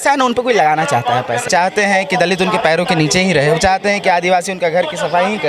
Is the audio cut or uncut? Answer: cut